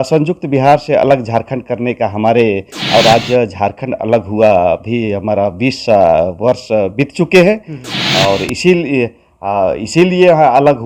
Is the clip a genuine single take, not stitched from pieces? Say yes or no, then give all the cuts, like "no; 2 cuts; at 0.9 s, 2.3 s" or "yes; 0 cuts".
no; 1 cut; at 2.7 s